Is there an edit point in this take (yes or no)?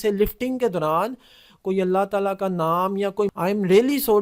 yes